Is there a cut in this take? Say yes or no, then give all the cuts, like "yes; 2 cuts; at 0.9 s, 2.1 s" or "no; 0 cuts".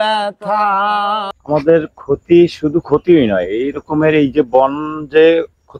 yes; 1 cut; at 1.3 s